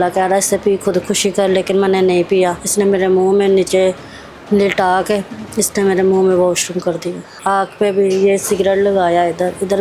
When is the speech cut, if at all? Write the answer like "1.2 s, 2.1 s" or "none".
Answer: 2.6 s, 7.3 s